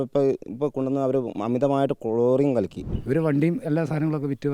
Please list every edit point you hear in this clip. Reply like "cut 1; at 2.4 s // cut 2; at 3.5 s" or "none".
cut 1; at 2.8 s